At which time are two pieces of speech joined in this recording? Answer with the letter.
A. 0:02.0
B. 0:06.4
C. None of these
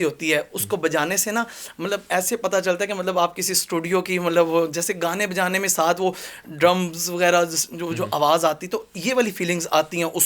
C